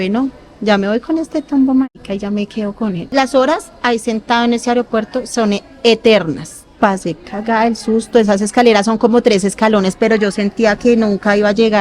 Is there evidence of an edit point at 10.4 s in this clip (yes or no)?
no